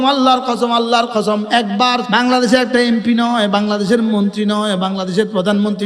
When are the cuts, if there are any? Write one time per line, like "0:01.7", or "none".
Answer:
0:02.0